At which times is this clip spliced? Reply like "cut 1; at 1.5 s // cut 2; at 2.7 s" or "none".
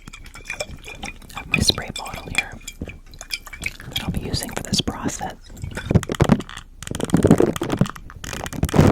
cut 1; at 5.9 s